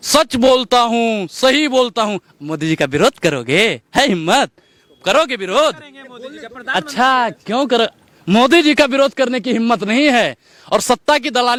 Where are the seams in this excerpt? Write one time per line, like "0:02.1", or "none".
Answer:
none

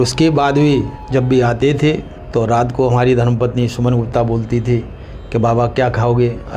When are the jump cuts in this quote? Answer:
0:01.0
0:02.1

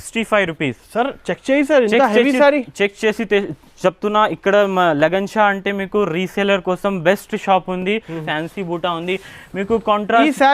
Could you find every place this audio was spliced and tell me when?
0:08.2

